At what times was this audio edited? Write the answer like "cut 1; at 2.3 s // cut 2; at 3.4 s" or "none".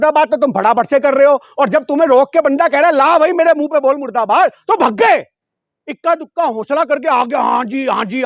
none